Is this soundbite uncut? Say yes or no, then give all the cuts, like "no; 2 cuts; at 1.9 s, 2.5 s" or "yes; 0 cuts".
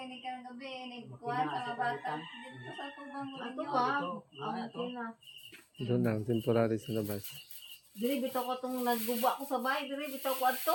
yes; 0 cuts